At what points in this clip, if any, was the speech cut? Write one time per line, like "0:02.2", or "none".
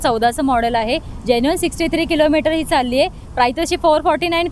none